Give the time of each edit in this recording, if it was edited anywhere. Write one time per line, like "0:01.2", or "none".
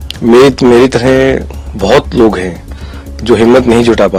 none